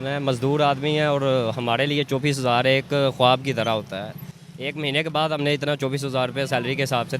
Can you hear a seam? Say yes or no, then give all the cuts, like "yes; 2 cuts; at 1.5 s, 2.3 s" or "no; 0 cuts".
no; 0 cuts